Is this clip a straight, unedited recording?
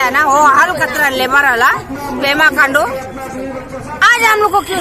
yes; 0 cuts

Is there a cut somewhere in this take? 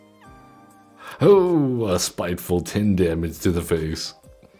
yes; 1 cut; at 1.1 s

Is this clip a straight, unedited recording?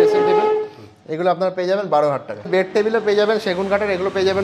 no; 1 cut; at 2.5 s

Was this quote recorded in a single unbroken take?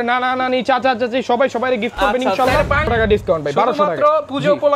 no; 1 cut; at 2.9 s

